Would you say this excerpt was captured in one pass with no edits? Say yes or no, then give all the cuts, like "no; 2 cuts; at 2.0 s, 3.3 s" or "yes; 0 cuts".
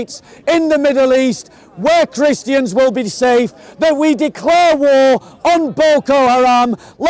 yes; 0 cuts